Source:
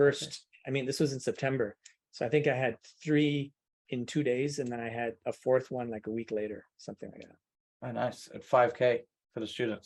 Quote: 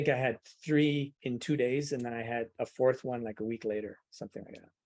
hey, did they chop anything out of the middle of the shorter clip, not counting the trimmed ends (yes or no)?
yes